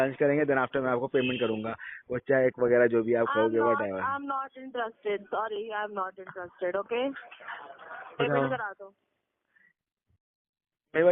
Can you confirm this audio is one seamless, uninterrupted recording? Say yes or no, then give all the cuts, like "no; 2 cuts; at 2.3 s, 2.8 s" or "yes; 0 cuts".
yes; 0 cuts